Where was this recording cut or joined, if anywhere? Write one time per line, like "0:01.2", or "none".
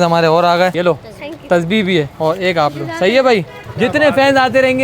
0:00.7
0:02.1
0:03.6